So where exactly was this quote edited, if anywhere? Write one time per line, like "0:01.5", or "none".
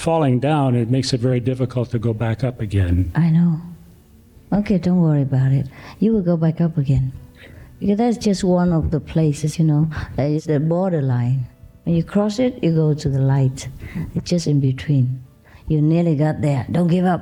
none

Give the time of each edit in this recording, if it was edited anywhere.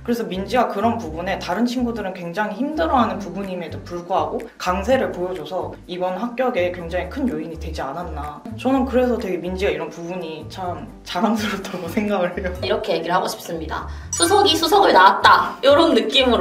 0:12.6

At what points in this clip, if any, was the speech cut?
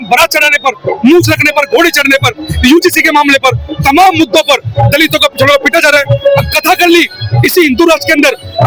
none

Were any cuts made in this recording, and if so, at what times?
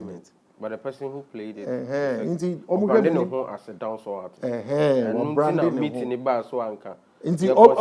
none

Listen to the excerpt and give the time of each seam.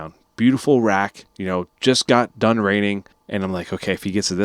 0:03.1

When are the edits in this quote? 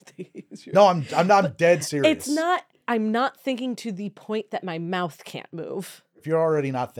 0:02.8
0:06.1

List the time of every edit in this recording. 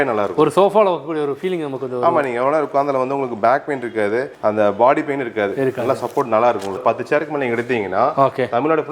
0:06.8

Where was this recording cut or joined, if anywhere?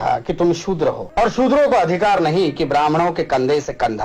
0:01.0

